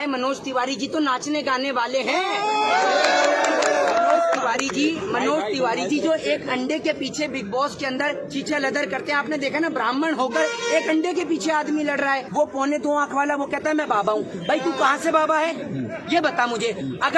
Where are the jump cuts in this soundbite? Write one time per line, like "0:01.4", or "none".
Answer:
0:12.3

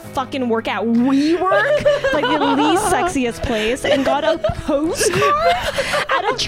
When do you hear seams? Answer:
none

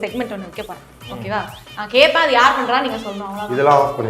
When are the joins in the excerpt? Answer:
none

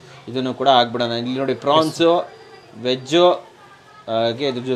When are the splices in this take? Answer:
none

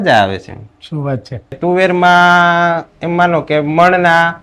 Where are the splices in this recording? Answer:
0:01.6

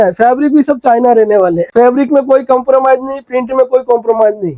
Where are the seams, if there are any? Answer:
0:01.6

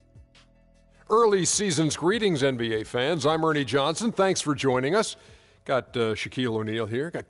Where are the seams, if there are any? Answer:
0:01.0

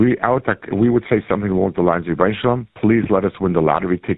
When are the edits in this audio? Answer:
0:02.7

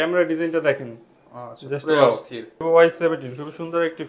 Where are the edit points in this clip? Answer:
0:02.6

